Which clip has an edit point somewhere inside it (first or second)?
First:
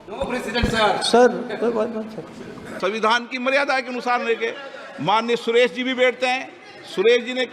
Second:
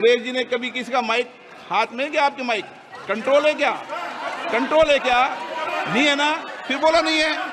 first